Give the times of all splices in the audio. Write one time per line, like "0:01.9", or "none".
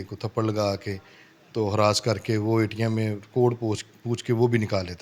none